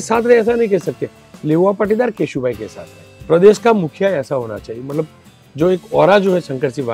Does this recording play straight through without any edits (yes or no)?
no